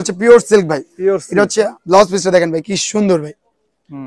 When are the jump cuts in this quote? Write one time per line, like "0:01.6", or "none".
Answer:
0:01.8